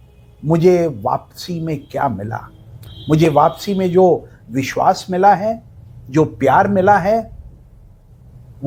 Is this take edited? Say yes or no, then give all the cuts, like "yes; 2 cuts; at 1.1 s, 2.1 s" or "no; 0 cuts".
no; 0 cuts